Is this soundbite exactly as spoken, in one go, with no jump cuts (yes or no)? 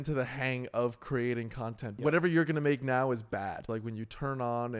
no